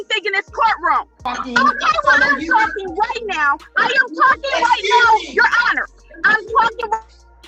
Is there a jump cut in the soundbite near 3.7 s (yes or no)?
no